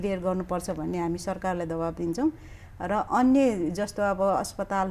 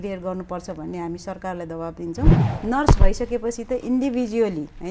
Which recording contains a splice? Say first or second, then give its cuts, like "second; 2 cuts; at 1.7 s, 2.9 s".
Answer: second; 1 cut; at 2.5 s